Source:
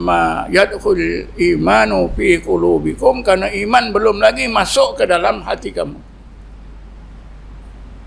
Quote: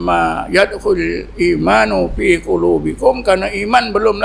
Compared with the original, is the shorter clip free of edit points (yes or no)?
yes